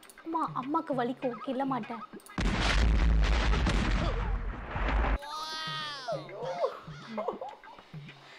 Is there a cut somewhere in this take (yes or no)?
no